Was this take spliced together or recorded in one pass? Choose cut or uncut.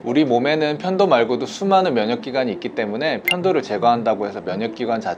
uncut